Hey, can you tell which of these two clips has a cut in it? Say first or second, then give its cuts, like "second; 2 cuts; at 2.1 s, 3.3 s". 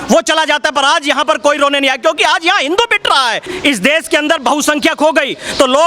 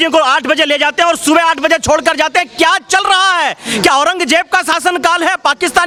first; 1 cut; at 3.4 s